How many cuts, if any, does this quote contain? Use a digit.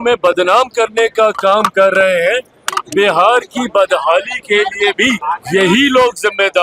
1